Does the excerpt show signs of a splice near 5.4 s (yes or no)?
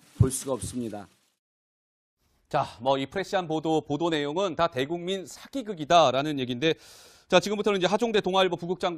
no